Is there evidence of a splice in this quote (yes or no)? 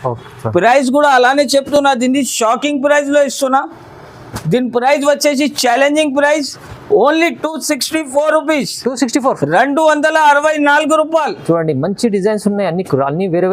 no